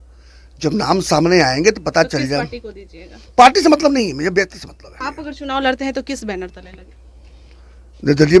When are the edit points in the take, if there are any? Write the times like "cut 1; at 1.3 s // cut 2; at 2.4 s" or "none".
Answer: cut 1; at 4.9 s